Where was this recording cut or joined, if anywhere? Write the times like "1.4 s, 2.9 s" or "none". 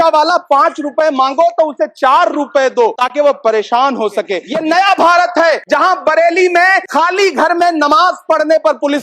3.0 s, 4.4 s, 5.6 s, 6.8 s